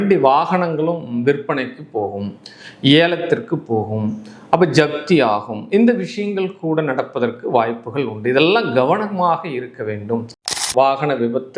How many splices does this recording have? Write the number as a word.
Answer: one